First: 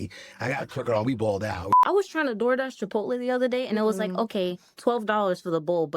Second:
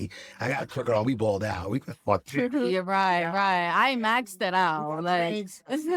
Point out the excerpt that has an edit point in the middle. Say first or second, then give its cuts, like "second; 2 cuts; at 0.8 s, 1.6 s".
first; 1 cut; at 1.7 s